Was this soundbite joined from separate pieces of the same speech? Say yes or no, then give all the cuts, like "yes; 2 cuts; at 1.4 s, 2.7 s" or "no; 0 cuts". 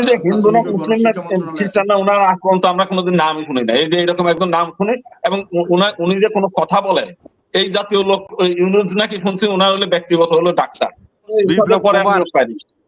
yes; 1 cut; at 11.3 s